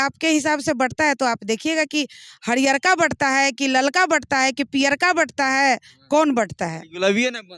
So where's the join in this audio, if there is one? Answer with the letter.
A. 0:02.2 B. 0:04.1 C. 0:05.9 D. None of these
D